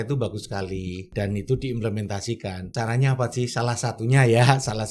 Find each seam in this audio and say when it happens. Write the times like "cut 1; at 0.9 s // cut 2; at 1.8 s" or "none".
cut 1; at 1.1 s // cut 2; at 2.6 s